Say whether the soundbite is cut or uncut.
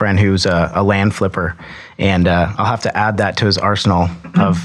uncut